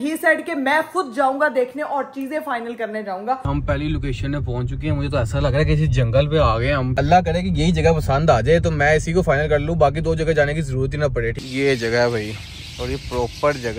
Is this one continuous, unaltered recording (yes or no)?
no